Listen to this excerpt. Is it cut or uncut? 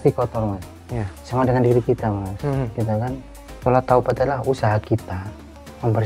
uncut